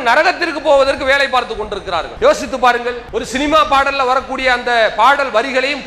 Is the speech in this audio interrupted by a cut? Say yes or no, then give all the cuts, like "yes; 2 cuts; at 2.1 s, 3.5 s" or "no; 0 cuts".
yes; 2 cuts; at 2.1 s, 3.0 s